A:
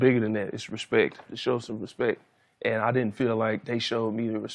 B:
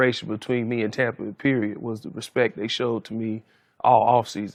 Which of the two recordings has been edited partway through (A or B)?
A